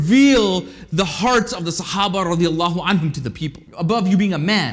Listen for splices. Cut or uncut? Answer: cut